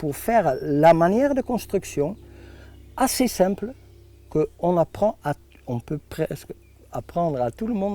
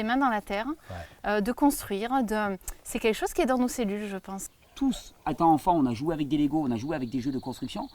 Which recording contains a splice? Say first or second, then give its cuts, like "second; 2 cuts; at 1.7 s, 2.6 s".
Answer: second; 1 cut; at 4.6 s